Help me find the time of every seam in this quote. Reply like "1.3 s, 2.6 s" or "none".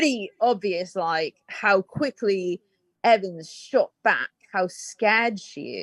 none